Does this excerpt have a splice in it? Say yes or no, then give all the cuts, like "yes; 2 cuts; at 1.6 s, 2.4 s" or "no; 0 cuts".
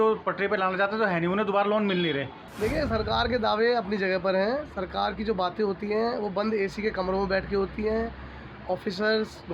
yes; 1 cut; at 2.4 s